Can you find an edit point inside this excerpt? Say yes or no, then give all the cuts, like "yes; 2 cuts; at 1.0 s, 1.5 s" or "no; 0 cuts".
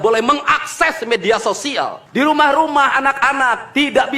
yes; 1 cut; at 2.0 s